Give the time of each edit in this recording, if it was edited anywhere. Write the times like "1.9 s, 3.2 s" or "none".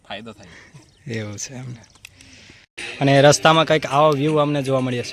2.8 s